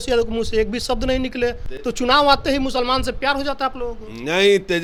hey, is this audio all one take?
yes; 0 cuts

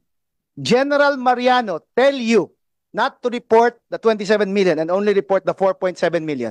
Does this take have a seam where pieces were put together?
no; 0 cuts

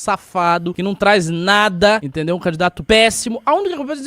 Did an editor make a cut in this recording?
yes; 2 cuts; at 0.8 s, 2.6 s

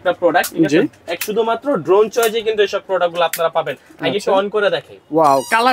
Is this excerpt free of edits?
yes; 0 cuts

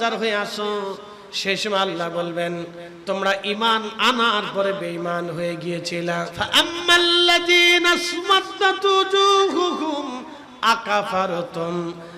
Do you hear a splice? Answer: yes; 1 cut; at 6.3 s

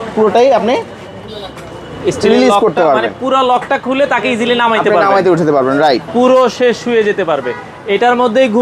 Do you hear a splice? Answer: yes; 1 cut; at 6.1 s

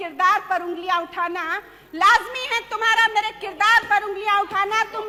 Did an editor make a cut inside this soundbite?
no; 0 cuts

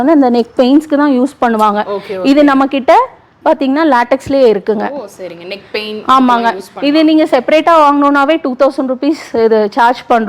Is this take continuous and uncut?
yes; 0 cuts

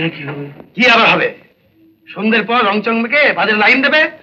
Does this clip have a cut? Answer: no; 0 cuts

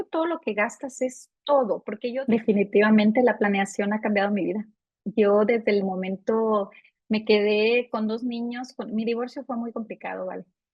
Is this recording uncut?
no; 1 cut; at 2.0 s

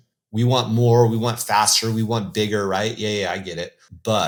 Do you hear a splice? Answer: no; 0 cuts

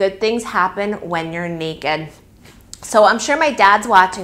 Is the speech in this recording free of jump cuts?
yes; 0 cuts

